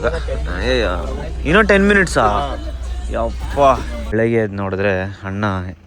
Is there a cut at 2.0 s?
no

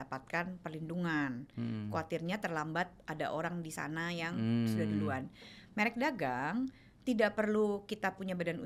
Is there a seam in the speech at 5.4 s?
no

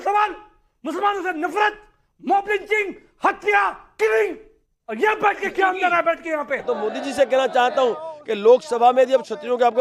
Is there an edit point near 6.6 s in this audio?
yes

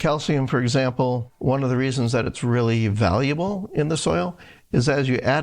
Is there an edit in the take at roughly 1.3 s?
yes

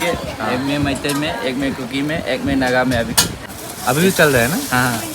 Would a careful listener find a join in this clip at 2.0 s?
no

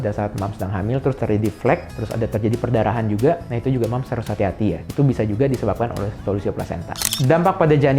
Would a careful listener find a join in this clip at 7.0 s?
yes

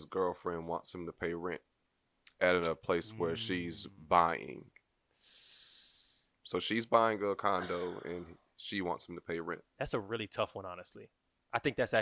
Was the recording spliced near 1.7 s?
no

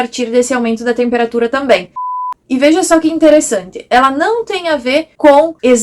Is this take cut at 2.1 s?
yes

